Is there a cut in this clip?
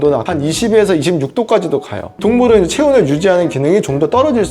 no; 0 cuts

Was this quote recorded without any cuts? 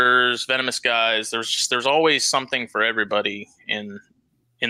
yes; 0 cuts

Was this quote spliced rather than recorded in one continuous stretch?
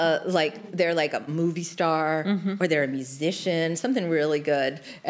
yes; 1 cut; at 1.3 s

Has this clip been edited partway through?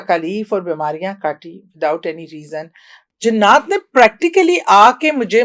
yes; 1 cut; at 3.0 s

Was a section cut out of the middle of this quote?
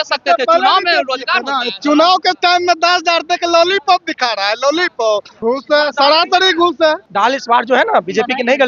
yes; 2 cuts; at 5.3 s, 7.0 s

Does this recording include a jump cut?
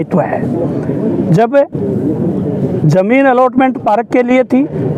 no; 0 cuts

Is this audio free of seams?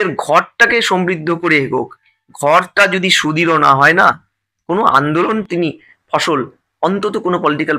yes; 0 cuts

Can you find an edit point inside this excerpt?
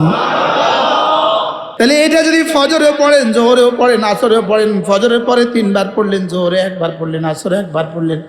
yes; 1 cut; at 1.6 s

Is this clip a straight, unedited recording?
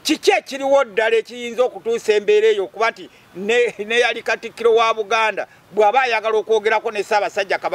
yes; 0 cuts

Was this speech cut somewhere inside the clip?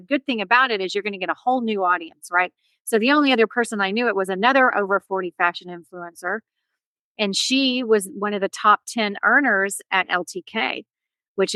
no; 0 cuts

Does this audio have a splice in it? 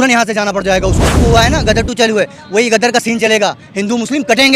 yes; 1 cut; at 1.2 s

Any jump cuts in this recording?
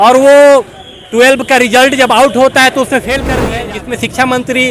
yes; 1 cut; at 3.5 s

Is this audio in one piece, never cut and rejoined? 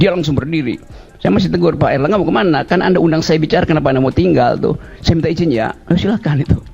yes; 0 cuts

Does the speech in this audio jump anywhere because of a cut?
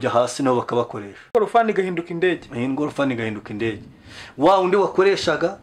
yes; 1 cut; at 1.3 s

